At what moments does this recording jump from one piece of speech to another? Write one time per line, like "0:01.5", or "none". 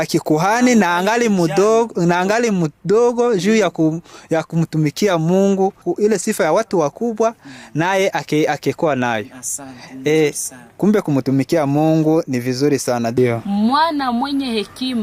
0:13.2